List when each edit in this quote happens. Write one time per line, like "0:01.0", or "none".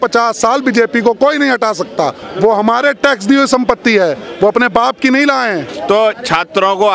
0:02.2
0:05.7